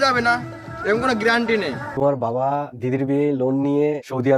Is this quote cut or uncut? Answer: cut